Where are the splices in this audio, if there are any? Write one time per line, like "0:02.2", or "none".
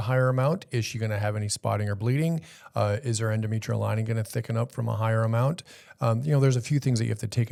none